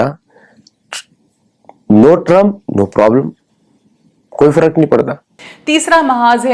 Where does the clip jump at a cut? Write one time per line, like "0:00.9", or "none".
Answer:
0:05.6